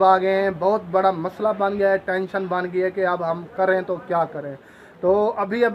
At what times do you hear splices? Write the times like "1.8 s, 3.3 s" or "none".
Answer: none